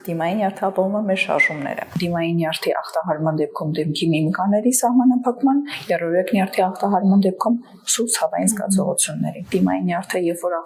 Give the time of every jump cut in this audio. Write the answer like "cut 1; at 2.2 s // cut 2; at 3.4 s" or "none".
cut 1; at 1.8 s // cut 2; at 9.5 s